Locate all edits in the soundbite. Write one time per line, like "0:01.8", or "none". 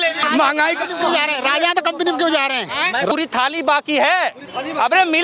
0:03.1

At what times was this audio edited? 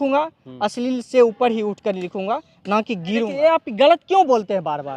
0:03.3

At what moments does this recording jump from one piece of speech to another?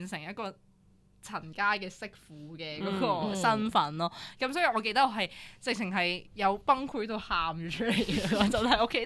none

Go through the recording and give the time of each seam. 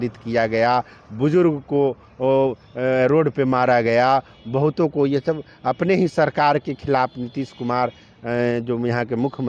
none

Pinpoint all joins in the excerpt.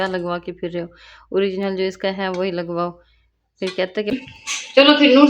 0:04.2

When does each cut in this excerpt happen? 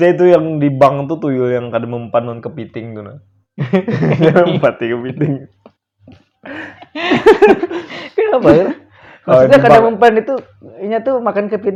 none

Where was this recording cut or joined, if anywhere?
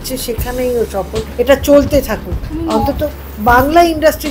0:01.2

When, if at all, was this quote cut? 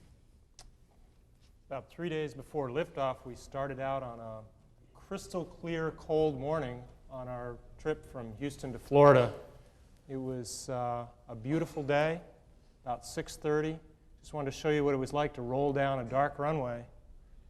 0:10.2

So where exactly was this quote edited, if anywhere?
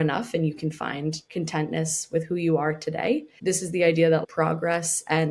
0:01.2
0:03.3
0:04.2

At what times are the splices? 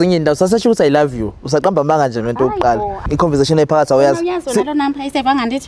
0:03.0

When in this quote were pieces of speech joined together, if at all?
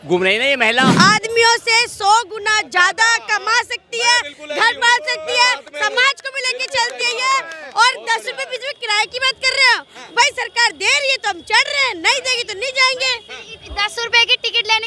0:00.9

